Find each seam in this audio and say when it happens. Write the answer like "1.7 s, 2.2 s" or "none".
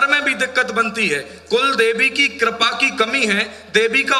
none